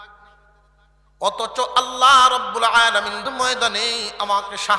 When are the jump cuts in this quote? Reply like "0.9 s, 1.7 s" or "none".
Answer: 3.3 s